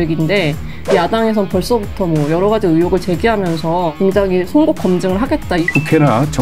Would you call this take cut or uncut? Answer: cut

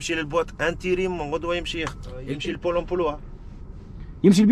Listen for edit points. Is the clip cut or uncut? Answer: cut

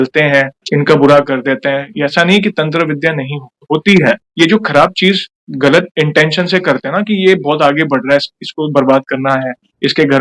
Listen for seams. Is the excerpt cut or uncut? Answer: uncut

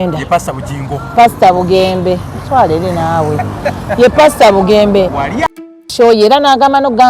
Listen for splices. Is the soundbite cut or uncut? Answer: cut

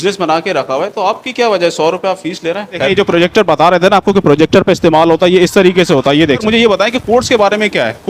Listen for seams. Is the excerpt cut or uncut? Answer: cut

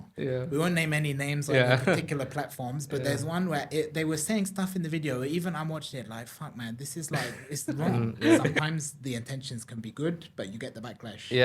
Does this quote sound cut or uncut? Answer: cut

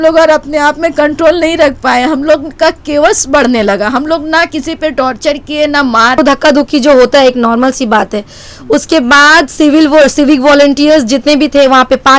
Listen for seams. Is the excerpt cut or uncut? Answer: cut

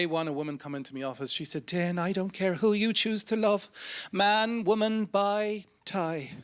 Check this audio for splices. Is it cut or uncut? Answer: uncut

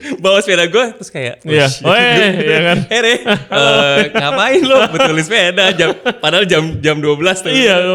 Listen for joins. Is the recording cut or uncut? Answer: uncut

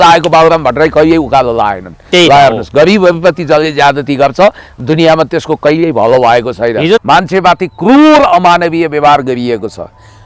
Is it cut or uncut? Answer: cut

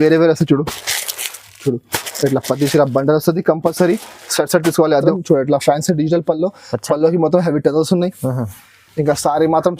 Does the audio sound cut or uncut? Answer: cut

